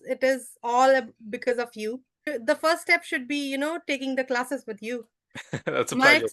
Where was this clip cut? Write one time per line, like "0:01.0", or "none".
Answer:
0:02.2